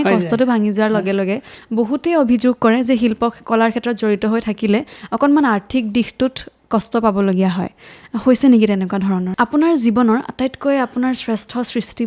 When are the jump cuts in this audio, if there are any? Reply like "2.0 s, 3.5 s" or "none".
1.5 s, 9.3 s